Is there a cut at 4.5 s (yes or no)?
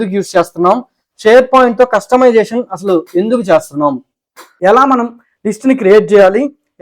yes